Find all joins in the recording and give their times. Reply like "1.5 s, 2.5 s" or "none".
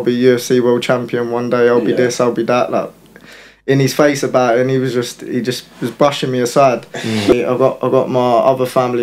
7.3 s